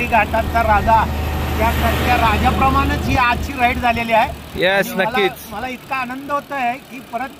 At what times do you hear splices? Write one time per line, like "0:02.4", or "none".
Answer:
none